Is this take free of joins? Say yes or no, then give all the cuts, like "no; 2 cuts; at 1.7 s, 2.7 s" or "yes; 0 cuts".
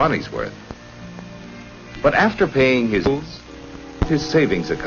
no; 1 cut; at 2.0 s